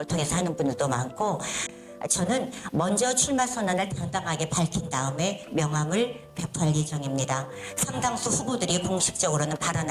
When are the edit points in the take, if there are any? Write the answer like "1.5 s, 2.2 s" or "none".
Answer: 1.6 s